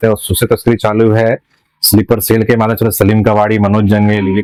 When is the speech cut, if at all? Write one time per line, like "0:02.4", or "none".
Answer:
none